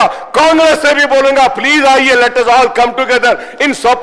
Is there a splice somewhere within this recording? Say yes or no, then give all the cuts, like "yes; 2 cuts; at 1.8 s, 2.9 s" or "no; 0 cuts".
no; 0 cuts